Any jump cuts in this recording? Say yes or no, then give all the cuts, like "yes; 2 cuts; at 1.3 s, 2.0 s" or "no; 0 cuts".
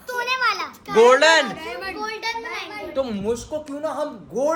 no; 0 cuts